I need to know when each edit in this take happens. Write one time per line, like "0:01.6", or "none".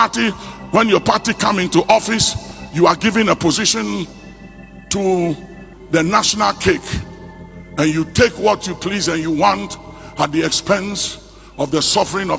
none